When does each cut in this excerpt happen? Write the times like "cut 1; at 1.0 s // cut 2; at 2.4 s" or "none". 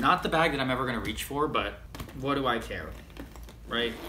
none